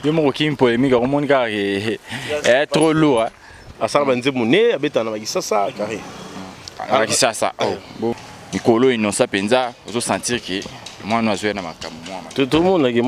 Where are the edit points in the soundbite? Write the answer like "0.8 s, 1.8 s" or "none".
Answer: 8.2 s